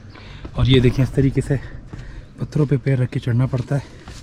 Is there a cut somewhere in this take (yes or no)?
no